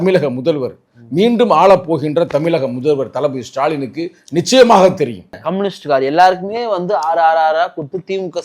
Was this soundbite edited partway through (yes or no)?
yes